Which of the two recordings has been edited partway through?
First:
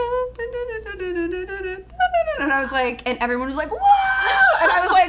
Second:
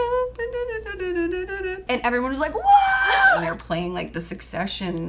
second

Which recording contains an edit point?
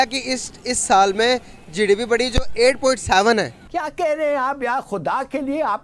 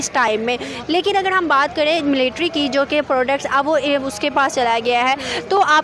first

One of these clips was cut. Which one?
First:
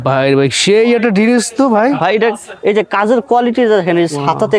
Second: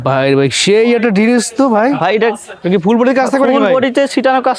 second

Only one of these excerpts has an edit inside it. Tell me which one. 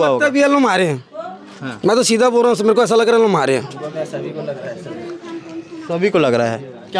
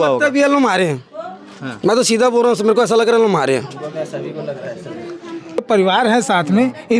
second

